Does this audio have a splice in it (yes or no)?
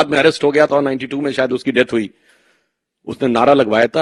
no